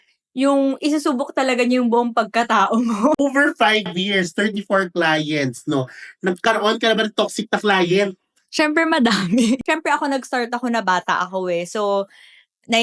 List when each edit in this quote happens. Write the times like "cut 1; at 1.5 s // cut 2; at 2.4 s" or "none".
cut 1; at 3.2 s // cut 2; at 9.6 s